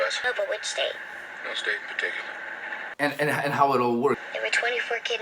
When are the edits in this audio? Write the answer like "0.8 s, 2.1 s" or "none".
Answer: 2.9 s